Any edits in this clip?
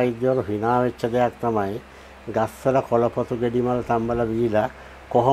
no; 0 cuts

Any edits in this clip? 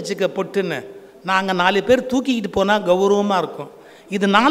no; 0 cuts

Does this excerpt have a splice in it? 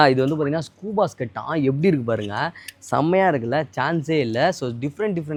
no; 0 cuts

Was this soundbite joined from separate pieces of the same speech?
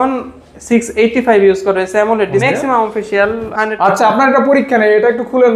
yes; 2 cuts; at 2.4 s, 3.4 s

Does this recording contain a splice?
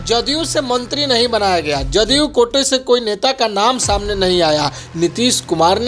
no; 0 cuts

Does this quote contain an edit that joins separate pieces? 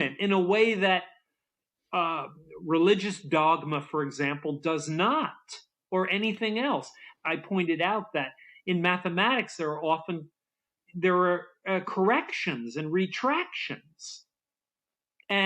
yes; 1 cut; at 7.1 s

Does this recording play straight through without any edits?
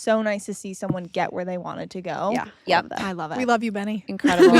yes; 0 cuts

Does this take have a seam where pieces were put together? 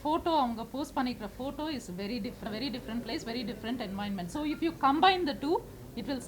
yes; 1 cut; at 2.5 s

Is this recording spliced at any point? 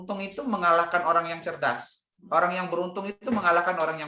no; 0 cuts

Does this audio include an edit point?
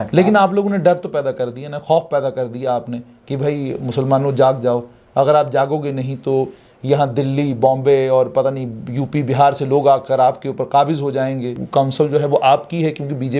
yes; 1 cut; at 11.6 s

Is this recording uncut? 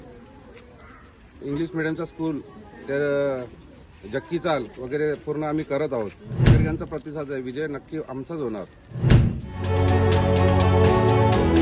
no; 2 cuts; at 6.5 s, 9.3 s

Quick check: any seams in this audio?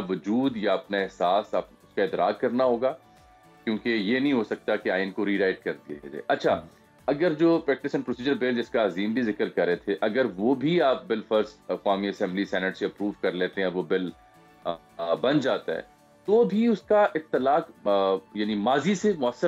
no; 0 cuts

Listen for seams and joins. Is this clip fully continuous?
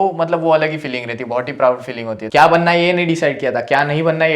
no; 1 cut; at 2.2 s

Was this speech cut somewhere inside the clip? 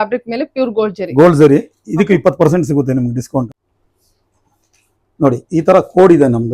yes; 1 cut; at 3.5 s

